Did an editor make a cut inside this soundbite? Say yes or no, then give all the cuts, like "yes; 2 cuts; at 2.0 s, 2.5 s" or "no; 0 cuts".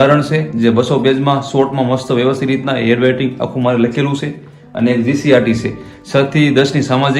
no; 0 cuts